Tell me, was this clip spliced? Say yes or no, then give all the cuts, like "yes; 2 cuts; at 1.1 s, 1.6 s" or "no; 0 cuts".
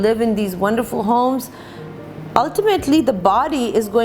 no; 0 cuts